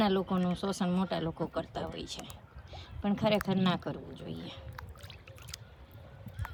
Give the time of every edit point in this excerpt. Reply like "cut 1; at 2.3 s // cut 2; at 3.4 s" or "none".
none